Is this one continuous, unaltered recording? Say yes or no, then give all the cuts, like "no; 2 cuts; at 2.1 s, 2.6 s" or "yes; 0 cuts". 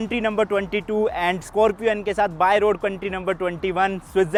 yes; 0 cuts